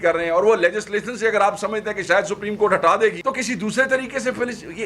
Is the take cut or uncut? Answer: cut